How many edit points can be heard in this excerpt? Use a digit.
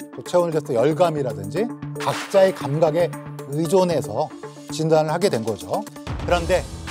1